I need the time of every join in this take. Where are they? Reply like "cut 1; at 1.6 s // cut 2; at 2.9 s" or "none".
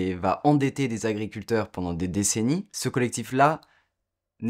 cut 1; at 2.7 s